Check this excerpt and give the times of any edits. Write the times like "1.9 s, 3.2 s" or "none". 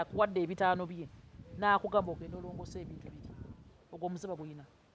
none

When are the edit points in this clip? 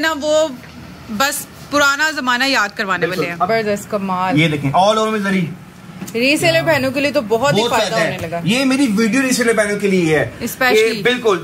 3.5 s

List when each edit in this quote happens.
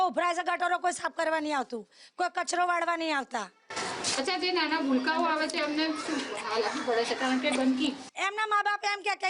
none

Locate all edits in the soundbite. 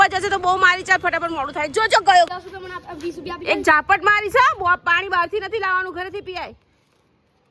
2.3 s

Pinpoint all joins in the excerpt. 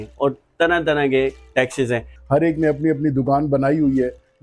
2.1 s

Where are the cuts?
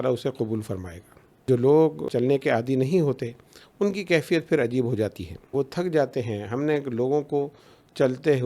1.4 s, 2.1 s, 5.5 s

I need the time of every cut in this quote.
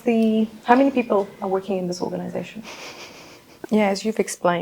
3.6 s

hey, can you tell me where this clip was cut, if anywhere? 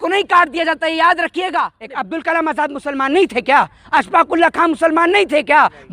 1.8 s

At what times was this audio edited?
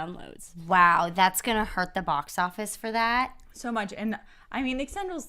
1.0 s

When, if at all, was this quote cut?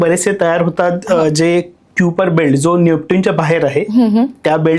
none

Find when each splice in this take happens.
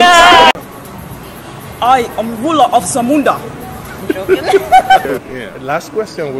5.0 s

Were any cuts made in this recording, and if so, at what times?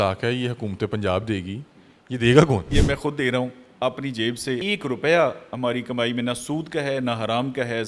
2.7 s, 4.6 s

